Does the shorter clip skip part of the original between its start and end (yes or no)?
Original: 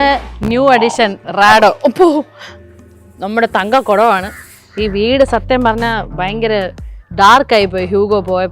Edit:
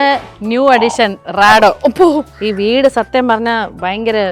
yes